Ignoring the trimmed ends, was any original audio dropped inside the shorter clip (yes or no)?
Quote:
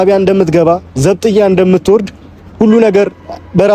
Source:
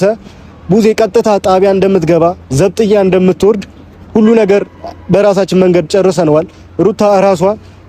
no